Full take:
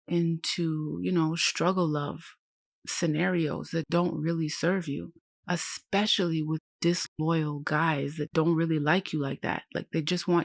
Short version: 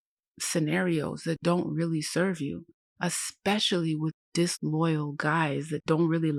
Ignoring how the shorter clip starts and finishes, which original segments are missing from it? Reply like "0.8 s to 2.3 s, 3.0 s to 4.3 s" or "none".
none